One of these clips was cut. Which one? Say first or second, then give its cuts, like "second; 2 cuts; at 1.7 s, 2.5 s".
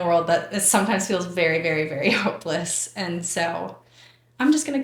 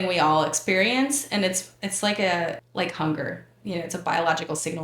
second; 1 cut; at 2.6 s